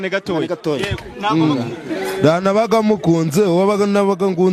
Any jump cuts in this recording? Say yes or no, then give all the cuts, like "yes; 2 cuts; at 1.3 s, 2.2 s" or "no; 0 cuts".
no; 0 cuts